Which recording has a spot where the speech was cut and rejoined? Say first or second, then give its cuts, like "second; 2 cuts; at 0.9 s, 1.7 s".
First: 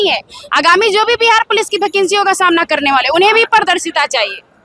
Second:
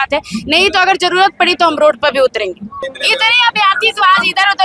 second; 1 cut; at 2.9 s